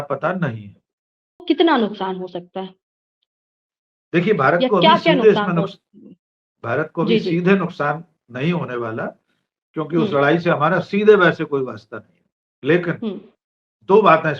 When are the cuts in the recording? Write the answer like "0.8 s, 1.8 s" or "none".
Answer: 1.4 s